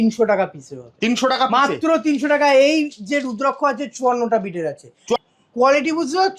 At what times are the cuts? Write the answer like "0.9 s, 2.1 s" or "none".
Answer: 5.1 s